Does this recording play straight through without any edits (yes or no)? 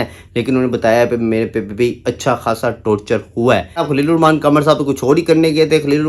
no